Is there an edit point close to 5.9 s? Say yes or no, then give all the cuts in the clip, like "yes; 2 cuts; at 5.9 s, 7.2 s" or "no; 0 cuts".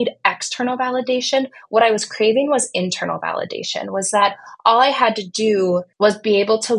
yes; 1 cut; at 5.9 s